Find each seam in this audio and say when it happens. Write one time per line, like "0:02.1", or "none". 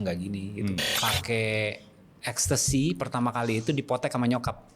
0:00.9